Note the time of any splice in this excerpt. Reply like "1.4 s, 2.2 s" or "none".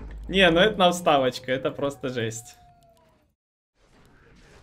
3.5 s